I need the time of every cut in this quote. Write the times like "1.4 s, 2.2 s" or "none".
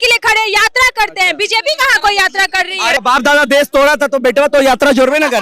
3.0 s